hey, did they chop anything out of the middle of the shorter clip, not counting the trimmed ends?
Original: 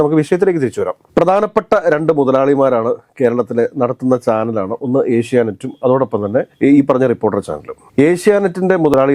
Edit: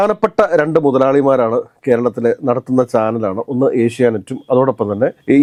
no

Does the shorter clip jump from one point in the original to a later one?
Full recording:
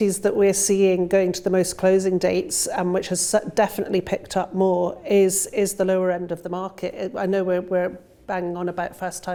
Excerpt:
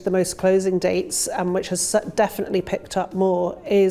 no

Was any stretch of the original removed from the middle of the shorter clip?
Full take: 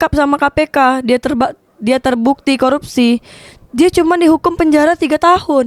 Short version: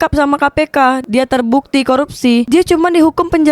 yes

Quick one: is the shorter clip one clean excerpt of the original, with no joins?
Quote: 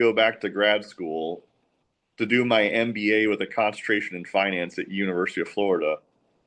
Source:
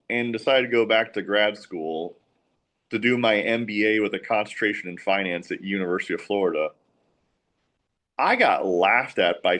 yes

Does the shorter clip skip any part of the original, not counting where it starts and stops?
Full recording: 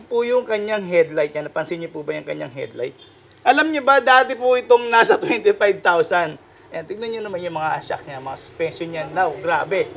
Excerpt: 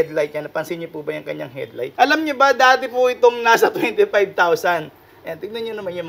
yes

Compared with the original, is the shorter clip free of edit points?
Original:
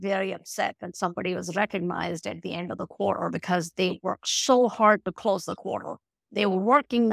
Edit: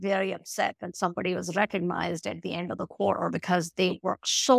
yes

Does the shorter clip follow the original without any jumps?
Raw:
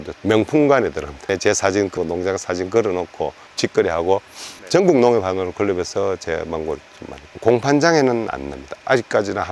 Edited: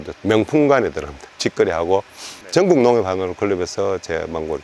no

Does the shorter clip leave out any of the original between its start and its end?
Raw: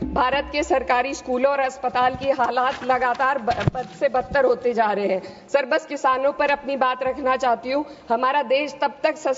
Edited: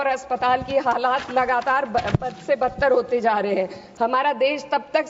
yes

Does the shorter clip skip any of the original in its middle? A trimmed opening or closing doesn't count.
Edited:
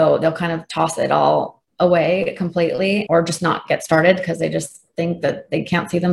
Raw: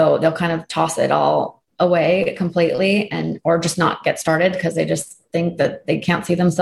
yes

